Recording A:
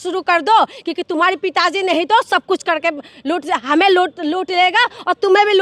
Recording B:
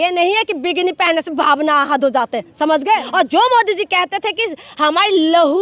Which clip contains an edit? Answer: B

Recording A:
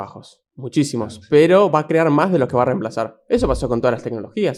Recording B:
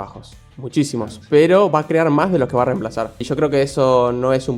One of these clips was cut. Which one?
B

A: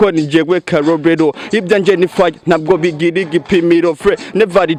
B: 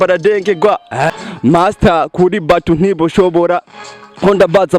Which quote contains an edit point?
B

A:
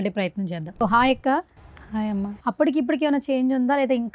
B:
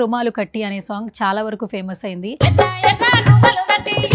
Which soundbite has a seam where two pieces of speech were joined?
A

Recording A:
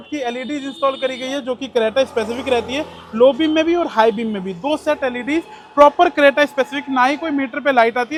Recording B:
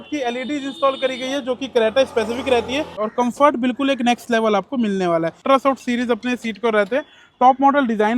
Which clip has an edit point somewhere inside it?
B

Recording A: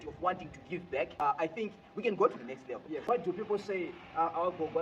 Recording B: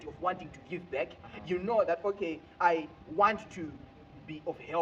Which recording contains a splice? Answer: A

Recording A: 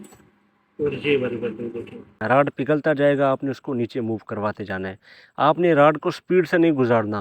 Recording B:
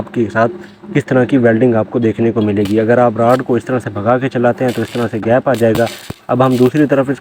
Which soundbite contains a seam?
A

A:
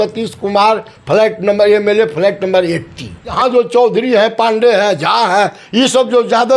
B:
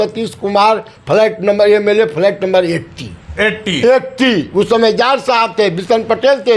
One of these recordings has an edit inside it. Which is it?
A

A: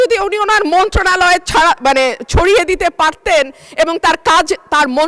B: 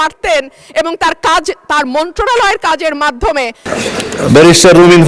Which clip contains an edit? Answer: B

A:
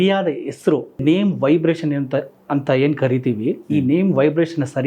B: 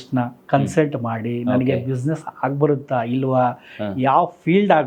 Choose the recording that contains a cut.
A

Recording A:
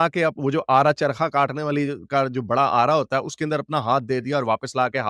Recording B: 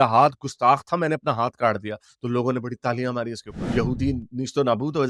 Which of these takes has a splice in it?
B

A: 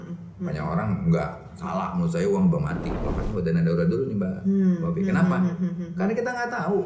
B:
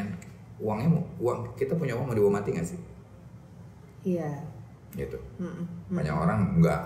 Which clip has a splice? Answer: A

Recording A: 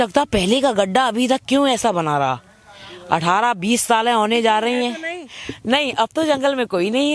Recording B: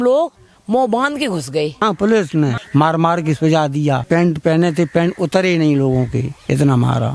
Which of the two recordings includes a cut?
B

